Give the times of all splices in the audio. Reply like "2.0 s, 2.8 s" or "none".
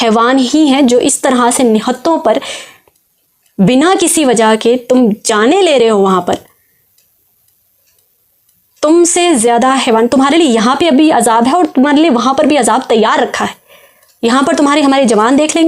none